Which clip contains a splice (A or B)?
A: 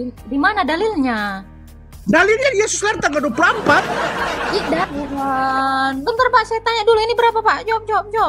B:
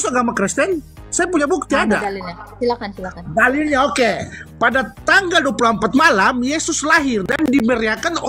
A